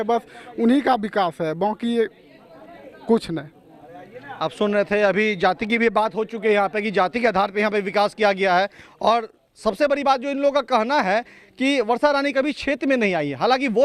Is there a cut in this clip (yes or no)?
no